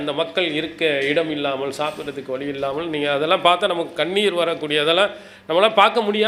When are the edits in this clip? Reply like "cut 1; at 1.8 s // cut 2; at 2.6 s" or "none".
none